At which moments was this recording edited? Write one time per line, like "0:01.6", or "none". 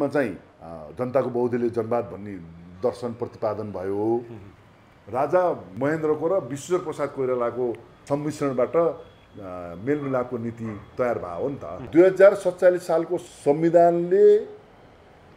0:11.8